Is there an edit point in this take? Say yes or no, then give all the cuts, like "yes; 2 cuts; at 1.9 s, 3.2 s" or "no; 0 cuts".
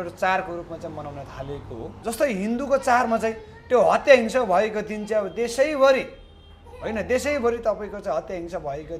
yes; 1 cut; at 2.0 s